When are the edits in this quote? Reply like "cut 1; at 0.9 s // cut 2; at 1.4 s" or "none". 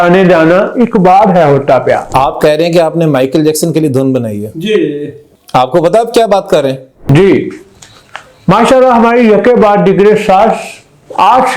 cut 1; at 2.1 s // cut 2; at 7.0 s